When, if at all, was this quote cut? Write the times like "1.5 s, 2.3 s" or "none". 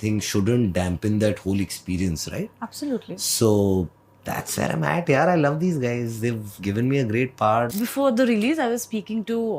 7.7 s